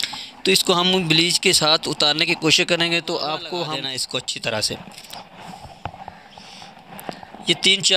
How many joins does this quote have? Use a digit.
1